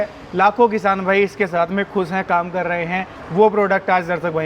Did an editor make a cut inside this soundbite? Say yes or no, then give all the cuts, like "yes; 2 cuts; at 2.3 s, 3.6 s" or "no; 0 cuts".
no; 0 cuts